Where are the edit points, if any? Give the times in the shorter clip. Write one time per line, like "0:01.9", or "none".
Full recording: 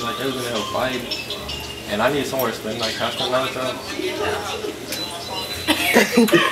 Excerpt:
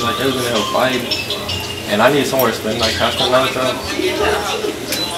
none